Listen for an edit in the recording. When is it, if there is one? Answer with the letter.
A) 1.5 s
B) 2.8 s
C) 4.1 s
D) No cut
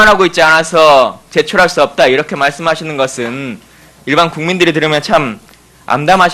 A